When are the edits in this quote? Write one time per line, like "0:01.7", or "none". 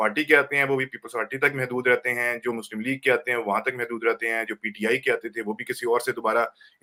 none